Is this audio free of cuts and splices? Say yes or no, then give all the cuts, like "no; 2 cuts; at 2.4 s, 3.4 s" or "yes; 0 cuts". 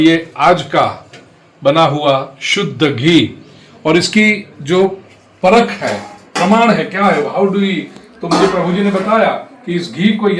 yes; 0 cuts